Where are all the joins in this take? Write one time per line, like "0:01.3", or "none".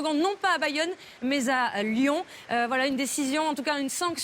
none